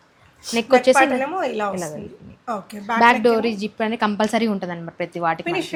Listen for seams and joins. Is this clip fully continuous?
yes; 0 cuts

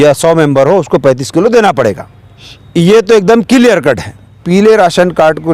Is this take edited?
yes; 1 cut; at 4.4 s

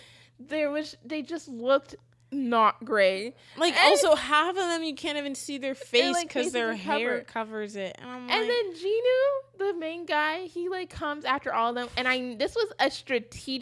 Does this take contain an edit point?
no; 0 cuts

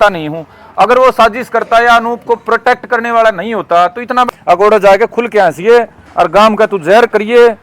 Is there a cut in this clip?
yes; 1 cut; at 4.3 s

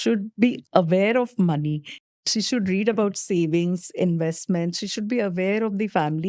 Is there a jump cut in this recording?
no; 0 cuts

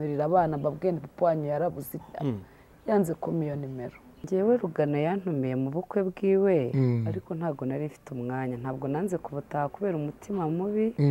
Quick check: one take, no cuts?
no; 1 cut; at 4.3 s

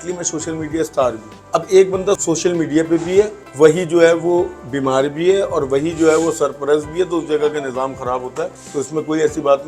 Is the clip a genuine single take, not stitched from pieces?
no; 4 cuts; at 1.3 s, 2.2 s, 3.4 s, 8.6 s

